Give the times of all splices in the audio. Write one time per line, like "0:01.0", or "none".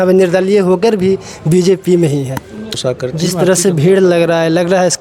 0:02.8